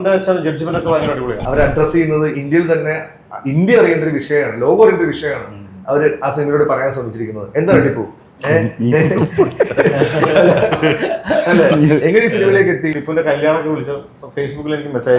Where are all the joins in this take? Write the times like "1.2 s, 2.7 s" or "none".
1.4 s, 12.9 s